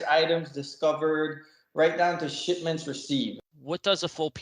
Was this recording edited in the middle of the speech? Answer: yes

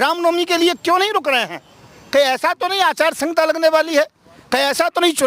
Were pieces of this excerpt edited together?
no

